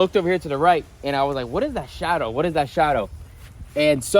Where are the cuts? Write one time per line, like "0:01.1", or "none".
none